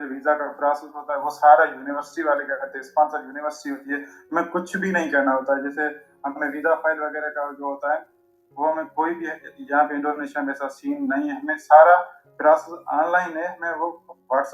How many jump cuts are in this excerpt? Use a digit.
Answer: 0